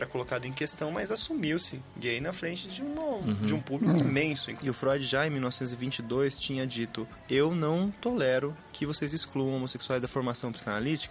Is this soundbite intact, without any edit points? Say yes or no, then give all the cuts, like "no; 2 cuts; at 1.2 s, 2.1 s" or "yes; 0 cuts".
no; 2 cuts; at 4.5 s, 7.1 s